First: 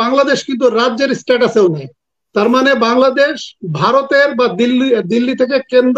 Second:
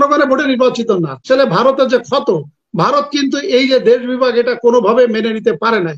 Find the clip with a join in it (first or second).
second